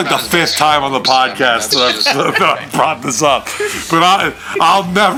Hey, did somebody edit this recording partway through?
no; 0 cuts

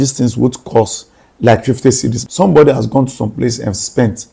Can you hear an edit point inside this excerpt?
yes; 1 cut; at 2.2 s

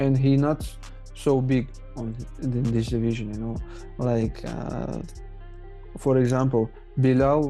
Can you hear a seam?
no; 0 cuts

